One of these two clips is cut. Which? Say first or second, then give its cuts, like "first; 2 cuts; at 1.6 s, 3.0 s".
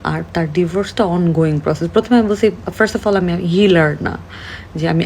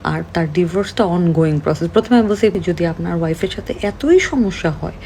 second; 1 cut; at 2.6 s